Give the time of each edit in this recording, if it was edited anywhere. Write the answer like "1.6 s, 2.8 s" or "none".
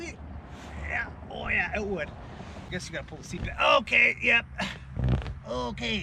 2.6 s